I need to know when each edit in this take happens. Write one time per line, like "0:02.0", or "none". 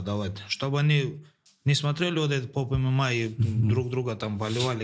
none